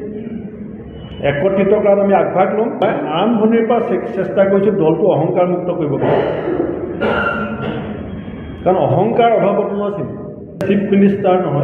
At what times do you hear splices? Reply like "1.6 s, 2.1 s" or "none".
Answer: 2.8 s, 10.6 s

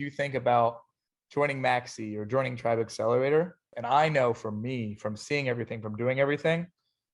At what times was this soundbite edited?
3.7 s

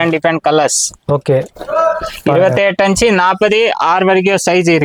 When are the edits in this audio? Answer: none

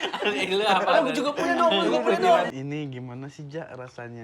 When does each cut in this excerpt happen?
2.5 s

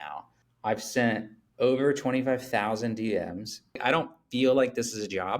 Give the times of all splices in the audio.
3.8 s

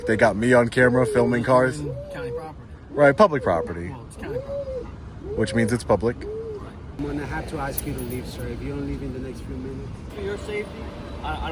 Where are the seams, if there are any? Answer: 6.9 s, 10.1 s

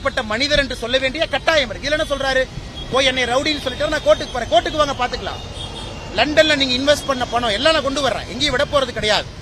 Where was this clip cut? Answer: none

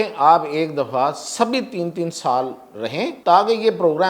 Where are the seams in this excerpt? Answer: 3.2 s

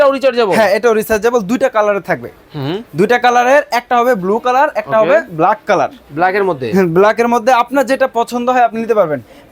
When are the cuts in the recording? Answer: none

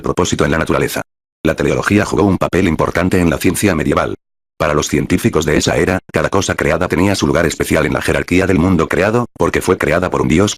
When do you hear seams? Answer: 1.2 s

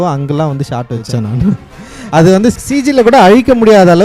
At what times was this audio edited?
2.6 s

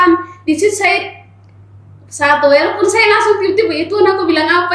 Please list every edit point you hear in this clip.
none

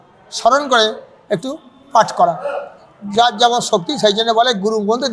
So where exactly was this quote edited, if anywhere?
none

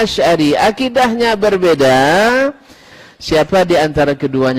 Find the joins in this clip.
none

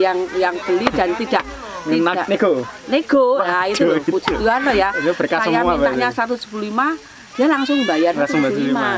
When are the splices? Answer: none

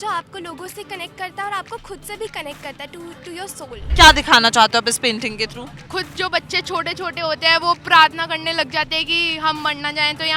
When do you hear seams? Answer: 3.8 s, 5.9 s

